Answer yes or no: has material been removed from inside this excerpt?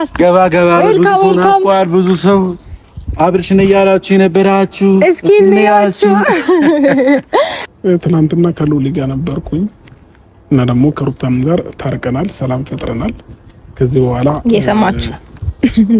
yes